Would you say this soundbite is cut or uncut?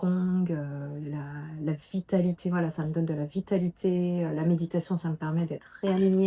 uncut